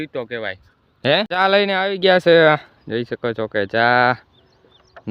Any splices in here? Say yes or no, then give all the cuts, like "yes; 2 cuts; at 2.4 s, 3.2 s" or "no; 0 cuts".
yes; 1 cut; at 1.3 s